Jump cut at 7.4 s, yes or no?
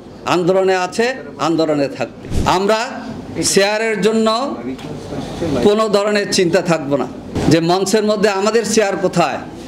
yes